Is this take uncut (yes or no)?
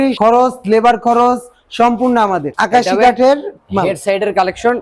no